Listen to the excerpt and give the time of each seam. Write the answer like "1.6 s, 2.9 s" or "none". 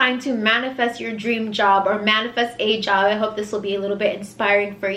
none